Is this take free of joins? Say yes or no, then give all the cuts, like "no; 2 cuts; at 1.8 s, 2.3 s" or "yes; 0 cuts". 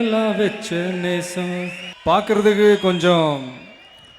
no; 1 cut; at 1.8 s